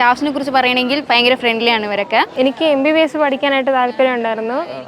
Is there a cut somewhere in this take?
yes; 1 cut; at 2.3 s

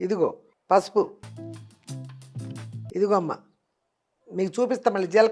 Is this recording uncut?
yes; 0 cuts

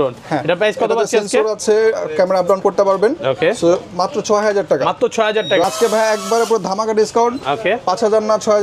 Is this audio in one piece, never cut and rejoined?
no; 1 cut; at 5.6 s

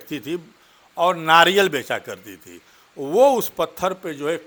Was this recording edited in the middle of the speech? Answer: no; 0 cuts

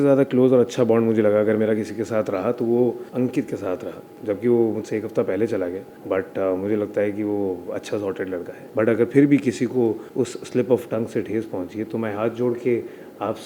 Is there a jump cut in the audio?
yes; 2 cuts; at 8.6 s, 10.0 s

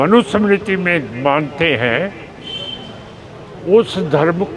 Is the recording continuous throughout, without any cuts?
yes; 0 cuts

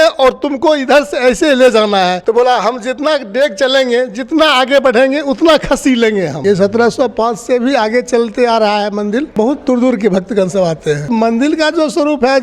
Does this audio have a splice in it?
yes; 4 cuts; at 2.2 s, 6.4 s, 9.3 s, 11.1 s

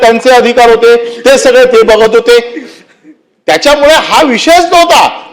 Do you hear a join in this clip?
no; 0 cuts

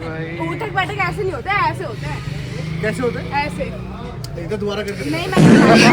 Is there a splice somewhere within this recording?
no; 0 cuts

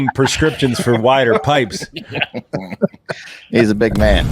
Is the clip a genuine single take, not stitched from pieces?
yes; 0 cuts

